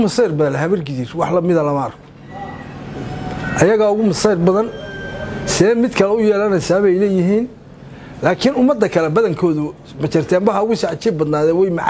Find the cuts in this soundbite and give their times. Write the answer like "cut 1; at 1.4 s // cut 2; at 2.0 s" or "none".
none